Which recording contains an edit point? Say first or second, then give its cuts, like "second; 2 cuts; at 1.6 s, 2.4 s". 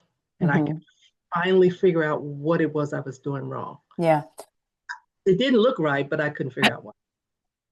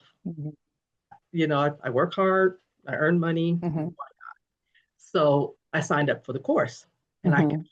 second; 2 cuts; at 1.1 s, 5.5 s